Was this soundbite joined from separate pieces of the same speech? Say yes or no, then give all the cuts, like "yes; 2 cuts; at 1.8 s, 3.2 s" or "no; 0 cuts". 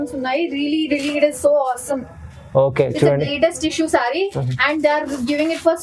no; 0 cuts